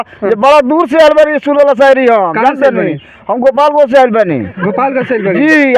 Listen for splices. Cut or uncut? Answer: uncut